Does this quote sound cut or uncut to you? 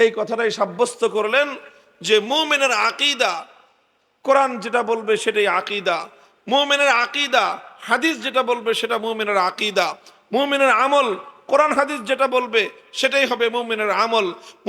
uncut